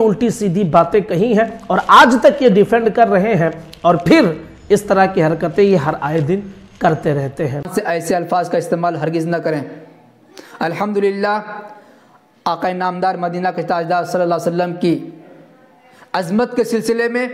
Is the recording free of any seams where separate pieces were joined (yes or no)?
no